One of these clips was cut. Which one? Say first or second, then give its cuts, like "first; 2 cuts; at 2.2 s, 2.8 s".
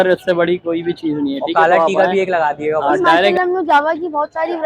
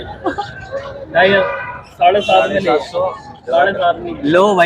first; 1 cut; at 3.3 s